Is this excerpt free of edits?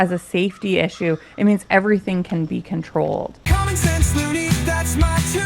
no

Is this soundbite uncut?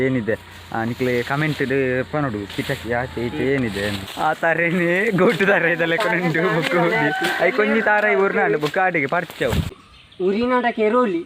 no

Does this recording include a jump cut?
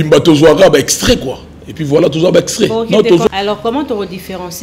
yes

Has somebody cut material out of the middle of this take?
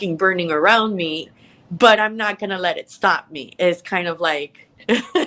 no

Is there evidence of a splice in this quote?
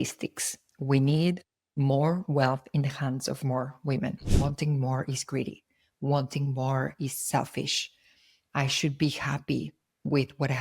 yes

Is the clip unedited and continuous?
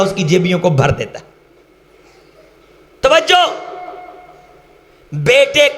no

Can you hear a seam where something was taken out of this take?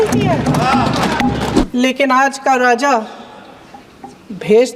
yes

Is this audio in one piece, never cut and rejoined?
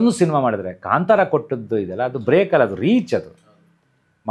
yes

